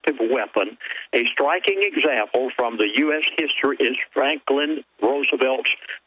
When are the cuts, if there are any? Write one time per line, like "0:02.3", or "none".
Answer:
0:01.7